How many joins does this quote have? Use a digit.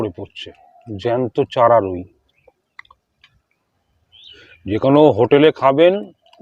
1